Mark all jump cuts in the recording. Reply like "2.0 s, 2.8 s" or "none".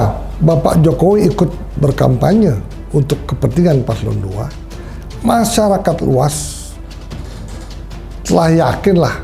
none